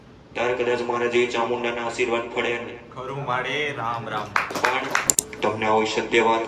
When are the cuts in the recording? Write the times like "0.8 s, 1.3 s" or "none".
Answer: 5.1 s